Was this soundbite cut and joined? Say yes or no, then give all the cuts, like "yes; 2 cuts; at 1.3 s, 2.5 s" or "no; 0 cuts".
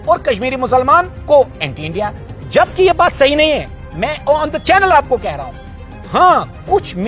no; 0 cuts